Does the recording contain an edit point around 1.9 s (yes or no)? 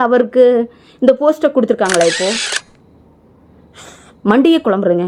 no